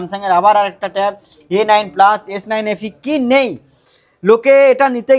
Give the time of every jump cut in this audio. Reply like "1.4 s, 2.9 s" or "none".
3.9 s